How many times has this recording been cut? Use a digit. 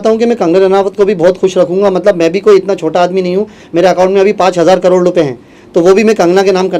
0